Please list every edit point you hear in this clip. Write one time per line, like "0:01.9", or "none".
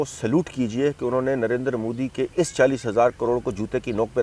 none

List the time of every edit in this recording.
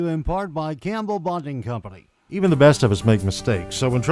0:02.4

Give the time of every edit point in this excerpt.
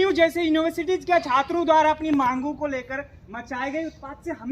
none

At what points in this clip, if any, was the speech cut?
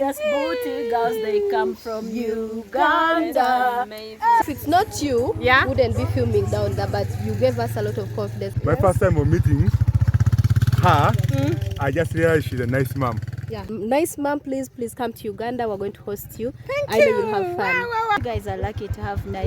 0:04.4
0:08.5
0:13.6
0:18.2

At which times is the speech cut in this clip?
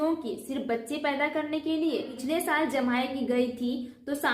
0:02.1

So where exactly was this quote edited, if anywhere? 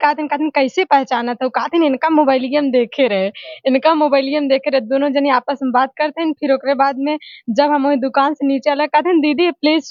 none

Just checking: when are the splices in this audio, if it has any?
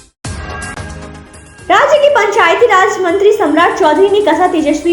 0:01.0

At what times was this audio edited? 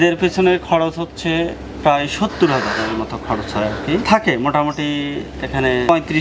0:04.0

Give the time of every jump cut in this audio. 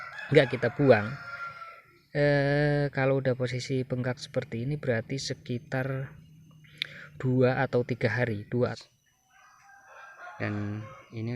0:08.8

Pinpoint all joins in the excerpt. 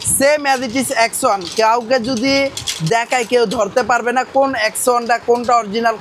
none

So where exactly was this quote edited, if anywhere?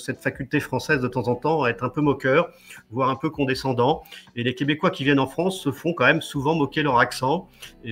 none

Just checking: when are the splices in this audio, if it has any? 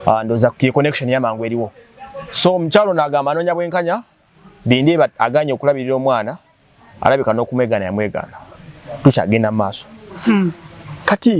none

